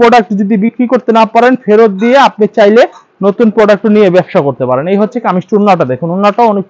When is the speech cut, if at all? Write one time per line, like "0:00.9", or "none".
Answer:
none

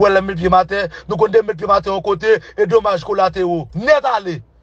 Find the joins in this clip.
0:03.7

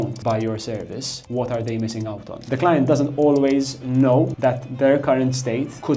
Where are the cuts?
0:02.3
0:04.3

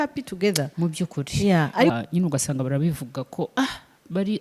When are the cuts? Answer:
0:01.9

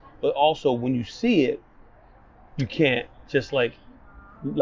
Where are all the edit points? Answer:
none

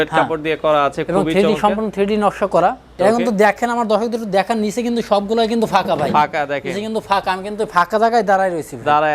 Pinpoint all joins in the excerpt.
0:02.9

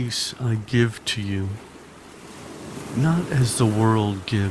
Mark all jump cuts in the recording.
0:01.6
0:02.9

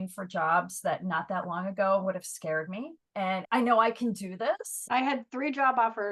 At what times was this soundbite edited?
0:03.3
0:04.7

